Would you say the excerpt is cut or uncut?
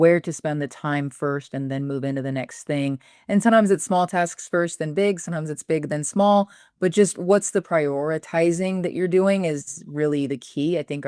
uncut